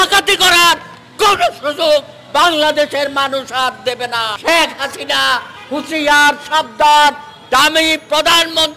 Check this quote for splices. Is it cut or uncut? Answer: cut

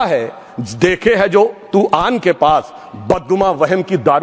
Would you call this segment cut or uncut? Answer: uncut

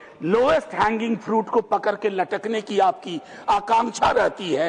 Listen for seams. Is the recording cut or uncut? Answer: uncut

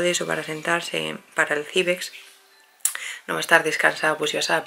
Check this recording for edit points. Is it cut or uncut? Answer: uncut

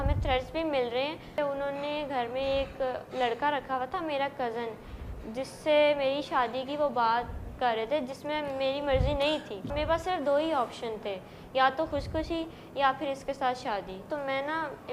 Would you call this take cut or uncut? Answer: cut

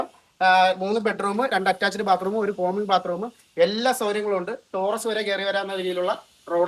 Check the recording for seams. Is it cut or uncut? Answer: uncut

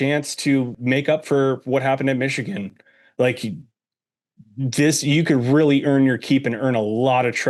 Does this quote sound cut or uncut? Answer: uncut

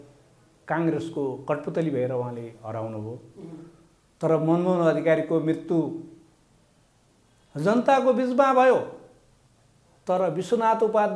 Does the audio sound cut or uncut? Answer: uncut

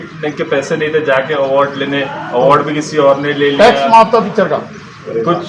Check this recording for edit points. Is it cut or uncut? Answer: uncut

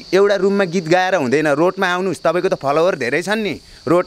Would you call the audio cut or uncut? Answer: uncut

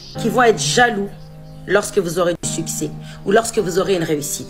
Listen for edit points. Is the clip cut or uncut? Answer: cut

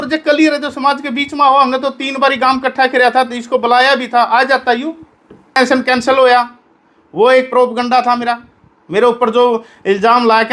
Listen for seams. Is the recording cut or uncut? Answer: cut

